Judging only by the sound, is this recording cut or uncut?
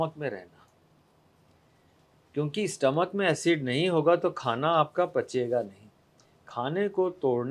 uncut